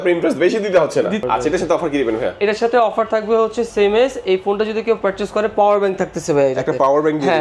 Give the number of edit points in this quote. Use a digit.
1